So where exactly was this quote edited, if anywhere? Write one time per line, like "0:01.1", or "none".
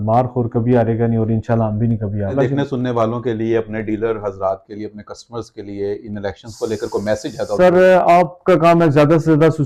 none